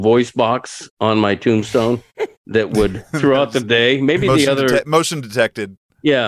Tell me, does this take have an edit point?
yes; 1 cut; at 2.1 s

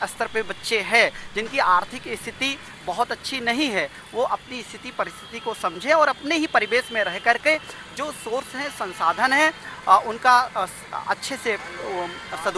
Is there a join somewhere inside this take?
no; 0 cuts

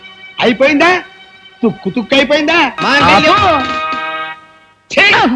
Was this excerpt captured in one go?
no; 1 cut; at 2.8 s

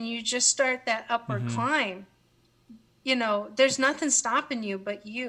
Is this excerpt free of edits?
yes; 0 cuts

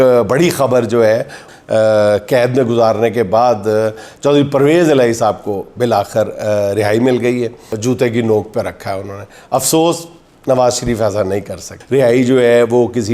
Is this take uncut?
no; 3 cuts; at 1.5 s, 7.7 s, 11.7 s

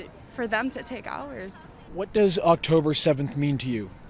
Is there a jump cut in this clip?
no; 0 cuts

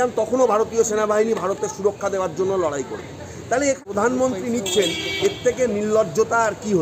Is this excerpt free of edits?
no; 1 cut; at 3.8 s

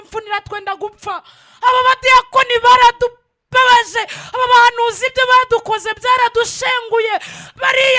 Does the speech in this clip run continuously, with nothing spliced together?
yes; 0 cuts

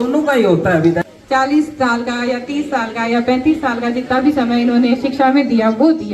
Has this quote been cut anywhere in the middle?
yes; 1 cut; at 1.1 s

